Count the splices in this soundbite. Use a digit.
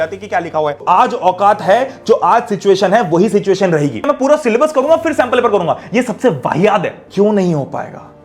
3